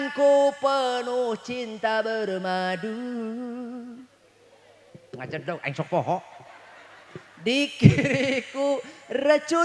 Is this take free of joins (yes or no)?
yes